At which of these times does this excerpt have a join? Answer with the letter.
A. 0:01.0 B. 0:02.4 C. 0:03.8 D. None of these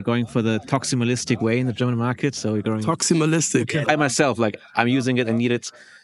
C